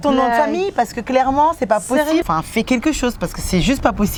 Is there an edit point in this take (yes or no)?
no